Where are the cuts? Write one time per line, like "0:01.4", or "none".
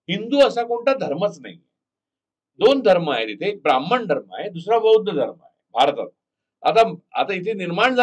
none